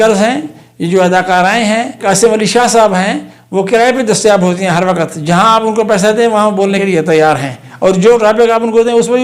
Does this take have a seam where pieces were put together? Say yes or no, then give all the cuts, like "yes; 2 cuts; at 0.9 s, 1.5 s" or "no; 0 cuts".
yes; 2 cuts; at 2.0 s, 6.8 s